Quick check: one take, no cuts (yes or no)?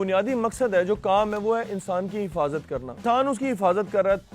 no